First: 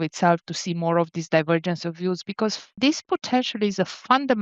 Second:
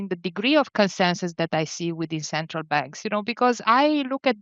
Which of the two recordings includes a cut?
first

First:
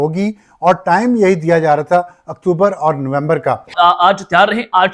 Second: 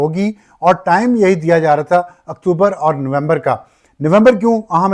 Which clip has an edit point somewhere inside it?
first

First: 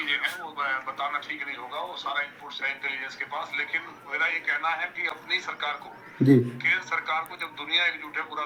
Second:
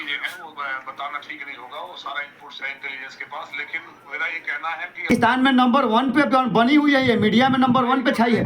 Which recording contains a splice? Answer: second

